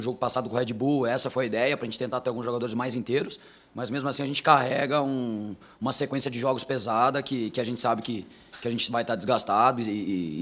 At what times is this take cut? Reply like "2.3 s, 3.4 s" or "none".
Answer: none

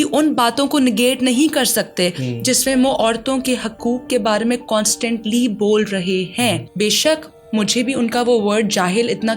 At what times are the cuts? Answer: 6.7 s

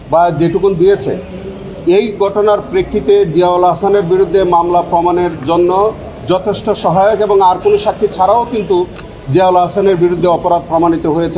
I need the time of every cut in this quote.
none

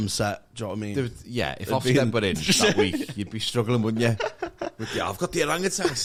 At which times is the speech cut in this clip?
none

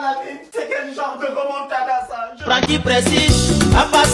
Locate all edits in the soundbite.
2.3 s

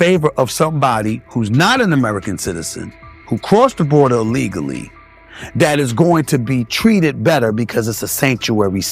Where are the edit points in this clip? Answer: none

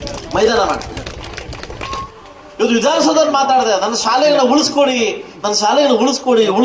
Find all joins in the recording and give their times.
2.1 s

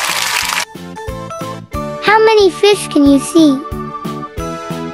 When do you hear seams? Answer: none

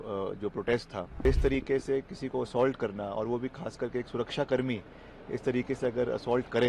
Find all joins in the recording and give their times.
1.2 s

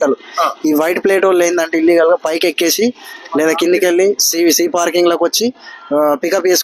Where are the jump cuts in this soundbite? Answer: none

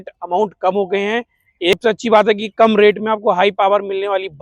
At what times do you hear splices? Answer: 1.7 s

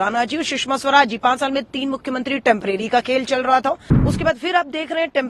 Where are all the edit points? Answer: 3.9 s

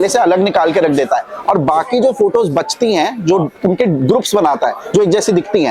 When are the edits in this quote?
none

